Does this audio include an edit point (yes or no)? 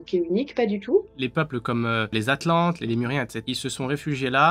yes